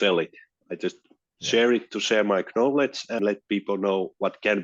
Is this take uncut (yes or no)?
no